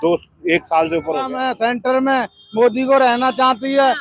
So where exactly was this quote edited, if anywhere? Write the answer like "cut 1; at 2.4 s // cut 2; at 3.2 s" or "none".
cut 1; at 1.3 s